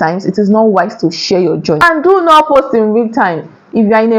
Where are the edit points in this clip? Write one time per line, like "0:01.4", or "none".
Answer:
0:01.8